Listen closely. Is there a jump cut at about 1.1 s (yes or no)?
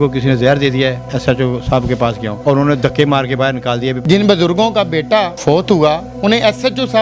yes